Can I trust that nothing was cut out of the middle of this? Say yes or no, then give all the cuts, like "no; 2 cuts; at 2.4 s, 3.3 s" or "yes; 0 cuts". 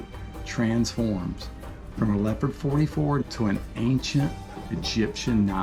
yes; 0 cuts